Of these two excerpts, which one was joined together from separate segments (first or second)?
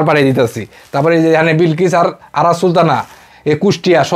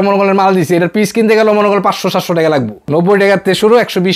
second